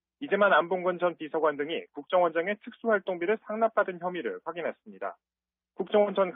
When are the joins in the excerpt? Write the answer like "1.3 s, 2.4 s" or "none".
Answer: 3.2 s

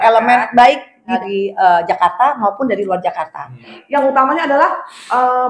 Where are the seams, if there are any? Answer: 1.2 s, 3.8 s

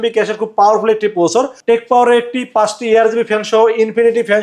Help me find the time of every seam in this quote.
1.6 s

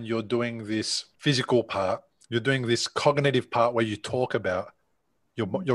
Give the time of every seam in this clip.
1.0 s

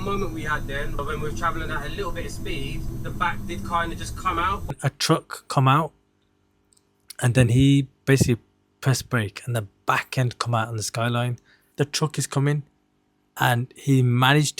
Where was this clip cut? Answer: 1.0 s, 2.9 s

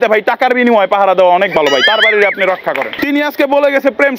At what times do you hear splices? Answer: 2.9 s

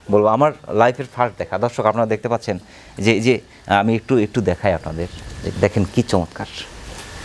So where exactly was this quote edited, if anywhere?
none

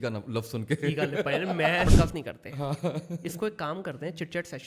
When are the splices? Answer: 1.9 s

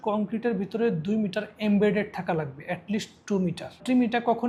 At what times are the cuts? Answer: none

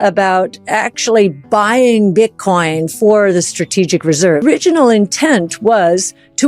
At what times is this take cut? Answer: 4.4 s

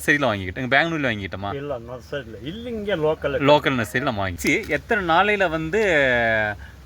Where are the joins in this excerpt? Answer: 4.4 s

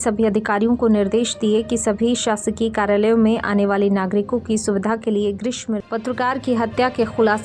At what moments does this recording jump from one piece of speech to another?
5.7 s

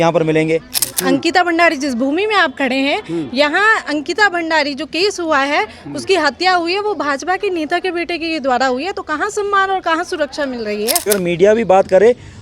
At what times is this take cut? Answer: 0.9 s, 11.1 s

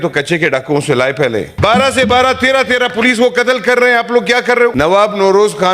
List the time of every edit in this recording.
1.5 s, 4.7 s

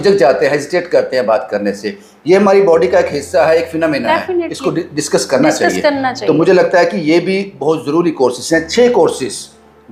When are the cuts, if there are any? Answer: none

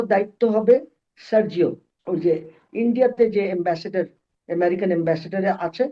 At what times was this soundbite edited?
1.9 s

